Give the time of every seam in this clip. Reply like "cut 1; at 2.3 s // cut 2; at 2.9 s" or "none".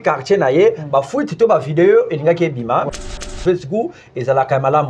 cut 1; at 2.9 s